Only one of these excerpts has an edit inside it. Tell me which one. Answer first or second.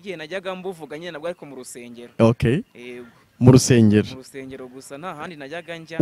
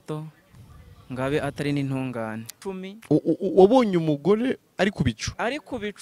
second